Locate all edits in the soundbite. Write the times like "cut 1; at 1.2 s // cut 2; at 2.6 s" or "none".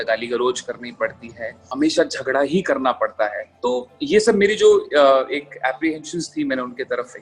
cut 1; at 1.6 s // cut 2; at 3.5 s